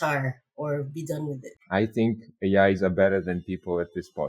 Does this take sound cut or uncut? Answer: cut